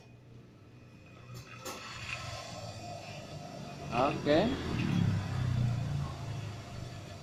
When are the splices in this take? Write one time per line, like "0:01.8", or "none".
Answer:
none